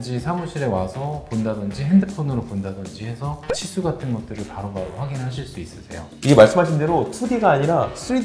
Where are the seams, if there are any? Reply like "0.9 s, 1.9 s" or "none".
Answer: 6.0 s